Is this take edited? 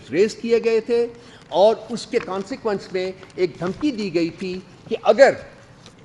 no; 0 cuts

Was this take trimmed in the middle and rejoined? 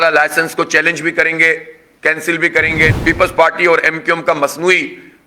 yes; 1 cut; at 3.0 s

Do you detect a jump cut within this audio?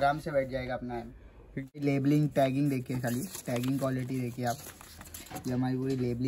yes; 1 cut; at 1.8 s

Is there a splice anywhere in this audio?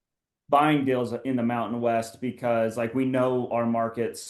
no; 0 cuts

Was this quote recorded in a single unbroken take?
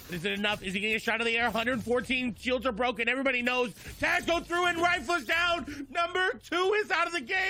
yes; 0 cuts

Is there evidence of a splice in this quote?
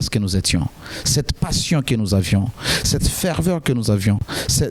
no; 0 cuts

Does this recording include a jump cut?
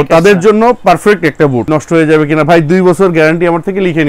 yes; 1 cut; at 1.7 s

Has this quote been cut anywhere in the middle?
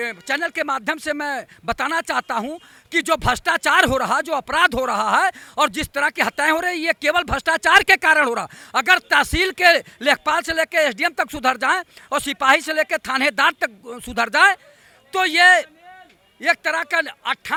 no; 0 cuts

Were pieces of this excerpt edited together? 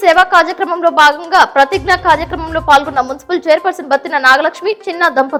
no; 0 cuts

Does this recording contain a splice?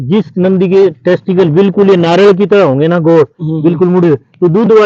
no; 0 cuts

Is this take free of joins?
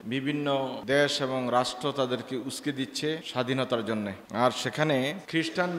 yes; 0 cuts

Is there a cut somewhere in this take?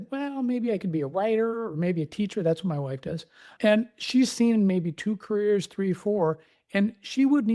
yes; 1 cut; at 3.5 s

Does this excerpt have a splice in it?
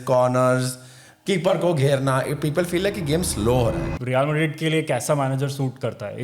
yes; 1 cut; at 3.9 s

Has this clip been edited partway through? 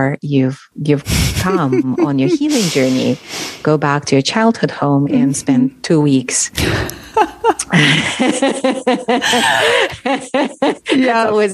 no; 0 cuts

